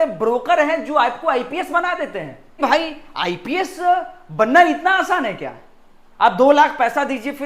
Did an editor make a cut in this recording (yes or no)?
yes